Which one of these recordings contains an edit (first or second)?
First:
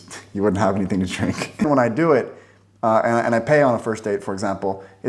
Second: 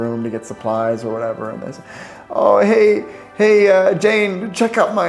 first